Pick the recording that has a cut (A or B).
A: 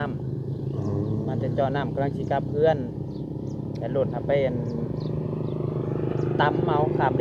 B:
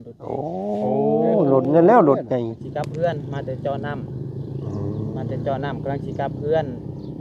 B